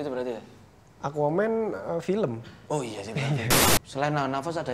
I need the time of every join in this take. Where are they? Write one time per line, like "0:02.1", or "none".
0:03.6